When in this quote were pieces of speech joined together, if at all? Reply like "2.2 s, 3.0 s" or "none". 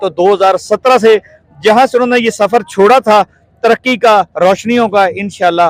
none